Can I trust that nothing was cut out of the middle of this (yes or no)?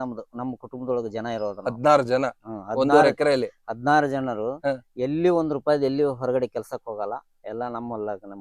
yes